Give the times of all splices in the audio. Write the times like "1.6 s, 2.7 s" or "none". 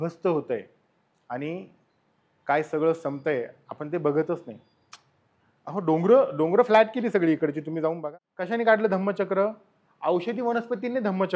8.0 s